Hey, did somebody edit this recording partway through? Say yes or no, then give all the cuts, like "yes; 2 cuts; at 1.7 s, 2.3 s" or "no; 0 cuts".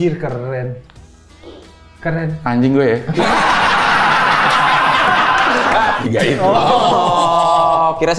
yes; 1 cut; at 5.9 s